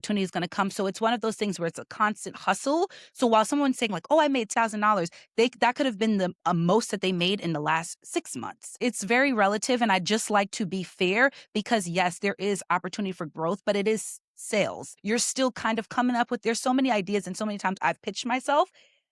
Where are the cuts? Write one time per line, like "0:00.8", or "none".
0:04.5
0:08.8
0:14.9